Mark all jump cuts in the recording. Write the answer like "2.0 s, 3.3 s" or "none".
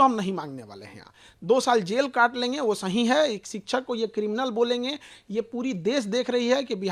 none